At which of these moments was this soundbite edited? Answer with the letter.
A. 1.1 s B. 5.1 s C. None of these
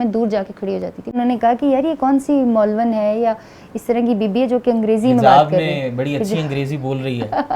A